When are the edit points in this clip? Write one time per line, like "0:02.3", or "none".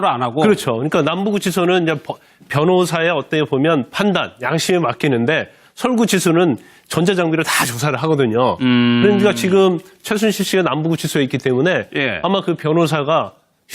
0:06.2